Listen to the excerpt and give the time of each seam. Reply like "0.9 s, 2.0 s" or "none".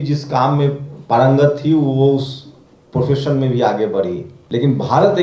4.3 s